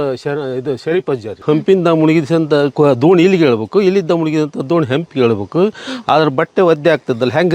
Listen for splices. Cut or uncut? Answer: cut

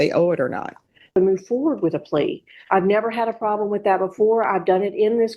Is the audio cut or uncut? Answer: cut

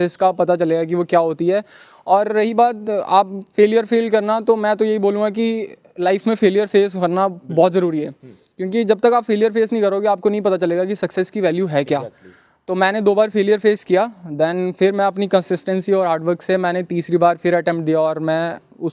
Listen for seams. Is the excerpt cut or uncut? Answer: uncut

